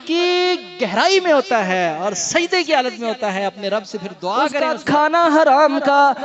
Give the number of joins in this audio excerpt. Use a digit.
1